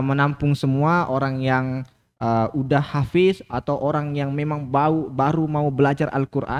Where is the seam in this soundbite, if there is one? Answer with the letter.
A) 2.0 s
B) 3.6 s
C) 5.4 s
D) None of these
D